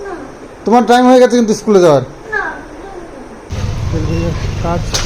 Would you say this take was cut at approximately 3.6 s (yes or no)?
yes